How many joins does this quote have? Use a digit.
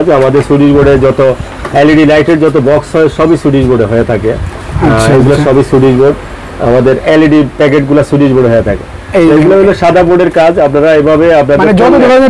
0